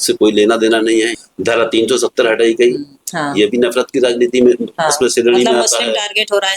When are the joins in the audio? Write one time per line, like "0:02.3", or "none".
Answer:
0:01.2
0:02.9